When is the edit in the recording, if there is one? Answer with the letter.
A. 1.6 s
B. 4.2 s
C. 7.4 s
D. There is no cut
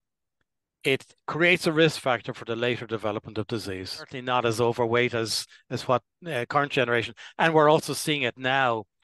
B